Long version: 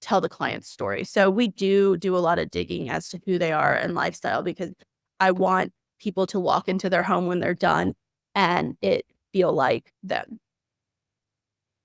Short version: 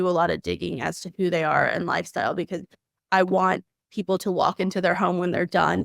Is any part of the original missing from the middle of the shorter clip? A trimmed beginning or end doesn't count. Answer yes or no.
no